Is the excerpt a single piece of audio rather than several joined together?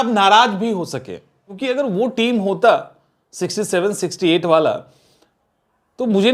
no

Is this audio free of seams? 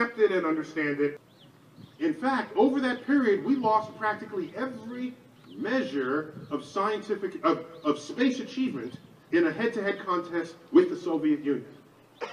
no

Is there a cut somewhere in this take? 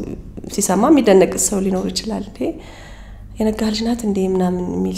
no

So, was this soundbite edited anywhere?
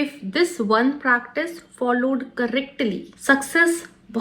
yes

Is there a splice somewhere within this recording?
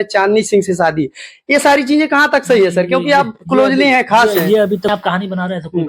yes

